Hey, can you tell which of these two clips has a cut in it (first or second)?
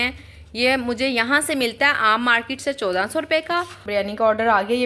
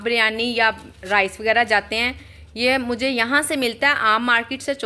first